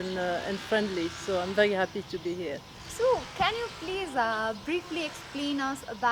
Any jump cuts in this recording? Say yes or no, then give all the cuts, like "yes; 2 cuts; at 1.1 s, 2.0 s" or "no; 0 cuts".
no; 0 cuts